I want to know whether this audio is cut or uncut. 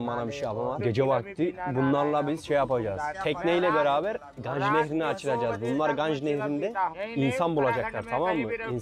cut